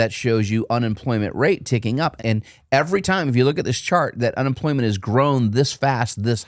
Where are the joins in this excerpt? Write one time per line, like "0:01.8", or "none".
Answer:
0:02.1